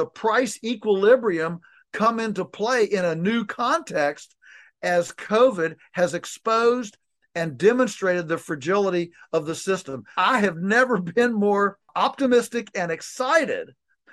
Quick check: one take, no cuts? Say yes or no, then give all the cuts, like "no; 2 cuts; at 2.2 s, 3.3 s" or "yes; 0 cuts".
no; 2 cuts; at 10.1 s, 11.9 s